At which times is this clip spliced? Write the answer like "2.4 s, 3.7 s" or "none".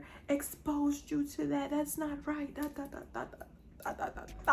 none